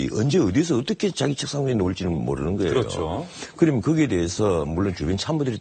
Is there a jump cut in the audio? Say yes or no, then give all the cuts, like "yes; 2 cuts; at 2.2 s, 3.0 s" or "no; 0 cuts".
yes; 1 cut; at 4.3 s